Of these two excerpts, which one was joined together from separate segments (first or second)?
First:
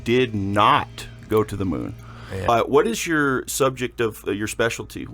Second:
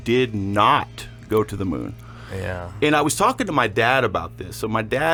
first